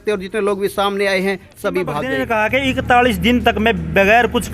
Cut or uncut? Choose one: cut